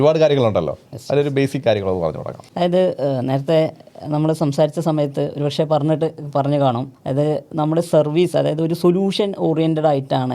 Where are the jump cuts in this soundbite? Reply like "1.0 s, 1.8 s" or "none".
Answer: none